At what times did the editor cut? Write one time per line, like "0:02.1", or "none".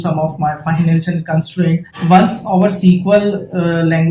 0:01.9